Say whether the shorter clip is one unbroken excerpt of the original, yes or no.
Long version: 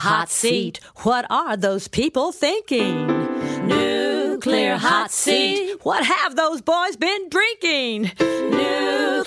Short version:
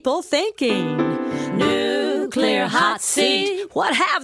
yes